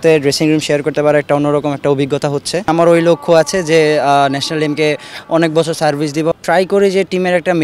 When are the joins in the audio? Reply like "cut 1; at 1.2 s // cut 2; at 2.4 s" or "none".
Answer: cut 1; at 2.7 s // cut 2; at 6.3 s